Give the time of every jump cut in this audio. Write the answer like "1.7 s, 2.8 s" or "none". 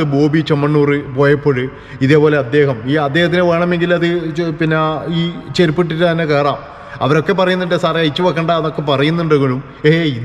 none